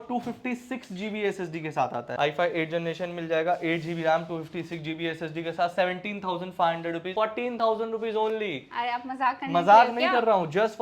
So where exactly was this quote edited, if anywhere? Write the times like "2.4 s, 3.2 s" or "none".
2.1 s, 7.1 s